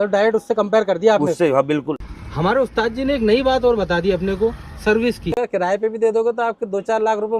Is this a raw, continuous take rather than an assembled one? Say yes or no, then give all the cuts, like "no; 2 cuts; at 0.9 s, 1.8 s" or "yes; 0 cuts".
no; 2 cuts; at 2.0 s, 5.4 s